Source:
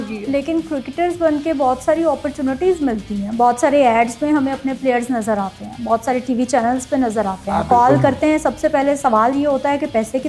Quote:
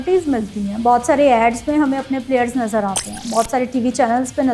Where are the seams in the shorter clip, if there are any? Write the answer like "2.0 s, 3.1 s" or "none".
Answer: none